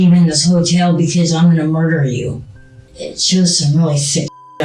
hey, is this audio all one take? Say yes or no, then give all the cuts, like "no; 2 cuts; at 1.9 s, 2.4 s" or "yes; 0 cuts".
no; 1 cut; at 2.9 s